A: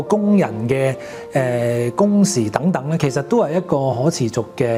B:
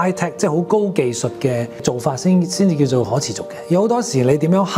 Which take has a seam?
B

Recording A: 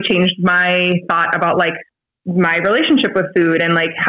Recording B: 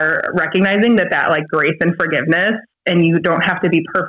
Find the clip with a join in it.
A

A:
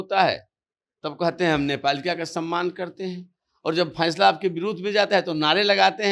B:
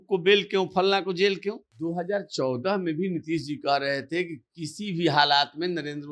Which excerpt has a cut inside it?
B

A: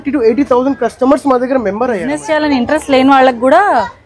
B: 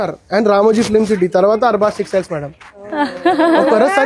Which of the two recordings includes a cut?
A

